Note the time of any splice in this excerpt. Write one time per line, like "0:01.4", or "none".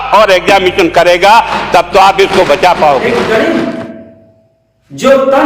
0:03.1